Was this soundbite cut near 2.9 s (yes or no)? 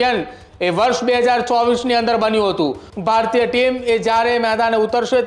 yes